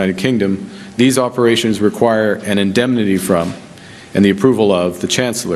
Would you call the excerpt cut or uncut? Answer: cut